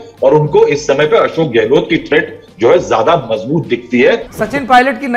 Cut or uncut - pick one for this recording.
cut